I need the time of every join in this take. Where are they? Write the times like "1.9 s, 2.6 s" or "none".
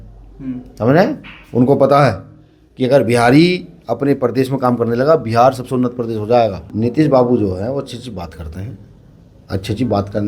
6.6 s